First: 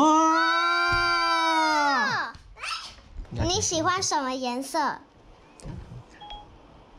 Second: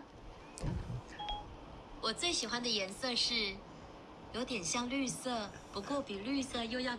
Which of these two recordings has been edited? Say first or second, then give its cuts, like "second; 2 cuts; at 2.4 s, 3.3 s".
first; 1 cut; at 3.2 s